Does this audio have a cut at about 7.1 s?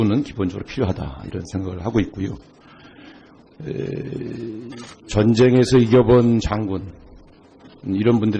no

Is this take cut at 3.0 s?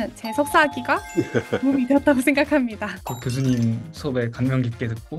yes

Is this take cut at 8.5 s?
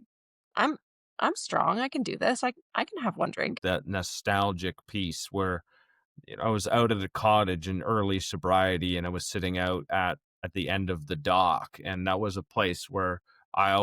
no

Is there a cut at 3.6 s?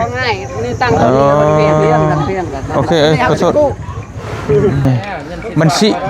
no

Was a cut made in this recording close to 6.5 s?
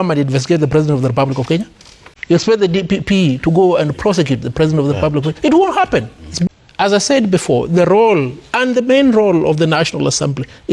yes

